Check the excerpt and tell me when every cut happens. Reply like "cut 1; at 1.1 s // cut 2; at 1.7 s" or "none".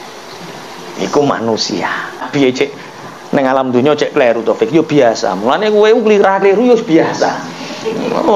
cut 1; at 2.2 s